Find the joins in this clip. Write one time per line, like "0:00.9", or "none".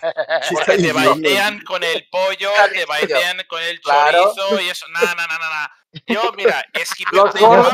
none